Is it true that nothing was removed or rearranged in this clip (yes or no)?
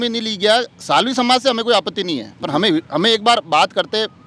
yes